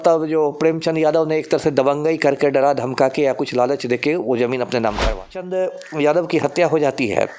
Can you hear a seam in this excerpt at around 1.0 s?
no; 1 cut; at 5.4 s

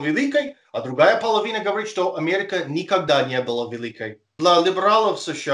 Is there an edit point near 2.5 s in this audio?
no; 1 cut; at 4.3 s

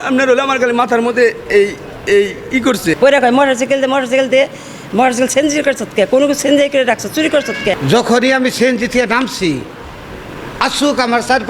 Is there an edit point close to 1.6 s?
no; 2 cuts; at 3.0 s, 7.8 s

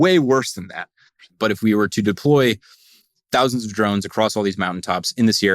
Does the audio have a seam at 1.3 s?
yes; 1 cut; at 1.3 s

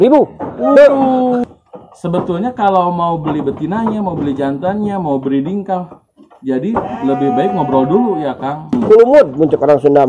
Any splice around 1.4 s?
yes; 2 cuts; at 1.4 s, 8.7 s

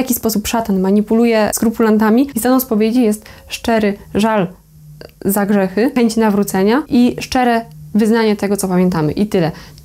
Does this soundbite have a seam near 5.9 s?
yes; 4 cuts; at 1.5 s, 2.3 s, 5.9 s, 6.9 s

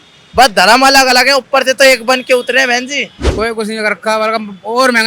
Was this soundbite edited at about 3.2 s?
yes; 1 cut; at 3.2 s

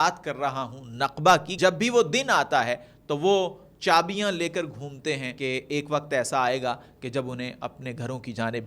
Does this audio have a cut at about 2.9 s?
no; 2 cuts; at 1.5 s, 5.3 s

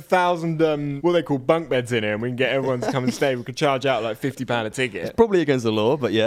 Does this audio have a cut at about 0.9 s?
yes; 1 cut; at 0.9 s

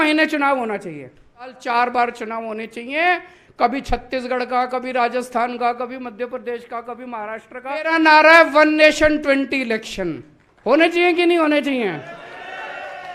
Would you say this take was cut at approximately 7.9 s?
yes; 2 cuts; at 1.6 s, 7.9 s

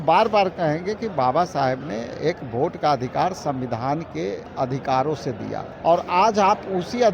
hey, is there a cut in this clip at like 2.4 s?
no; 2 cuts; at 4.4 s, 5.7 s

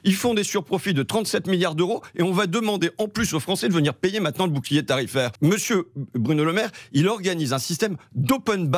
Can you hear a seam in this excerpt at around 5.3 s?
yes; 1 cut; at 5.3 s

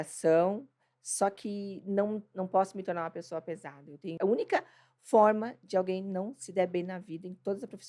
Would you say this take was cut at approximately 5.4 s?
no; 1 cut; at 4.1 s

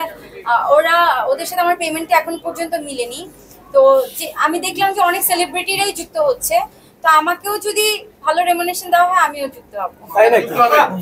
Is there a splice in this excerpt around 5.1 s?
no; 0 cuts

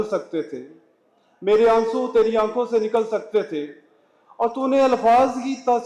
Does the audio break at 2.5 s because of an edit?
no; 0 cuts

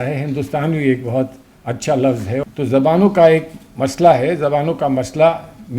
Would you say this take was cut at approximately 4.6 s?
no; 1 cut; at 2.4 s

